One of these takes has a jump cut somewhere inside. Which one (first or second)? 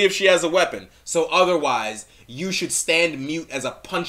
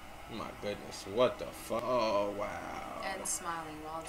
second